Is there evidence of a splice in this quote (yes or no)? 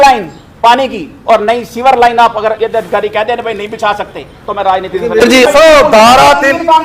yes